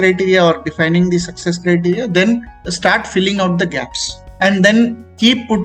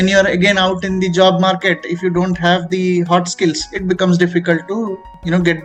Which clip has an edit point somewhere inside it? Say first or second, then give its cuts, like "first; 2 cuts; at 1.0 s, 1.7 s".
first; 1 cut; at 4.3 s